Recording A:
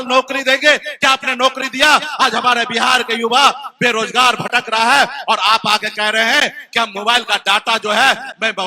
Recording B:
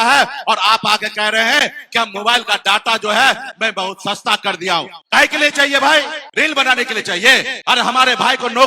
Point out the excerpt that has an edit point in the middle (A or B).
B